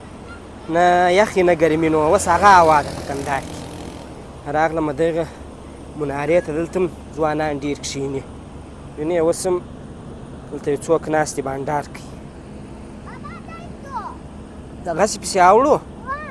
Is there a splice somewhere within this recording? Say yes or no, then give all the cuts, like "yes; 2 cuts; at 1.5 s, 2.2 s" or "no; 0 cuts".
no; 0 cuts